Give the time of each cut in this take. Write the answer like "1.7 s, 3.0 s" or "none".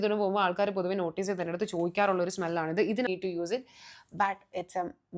3.1 s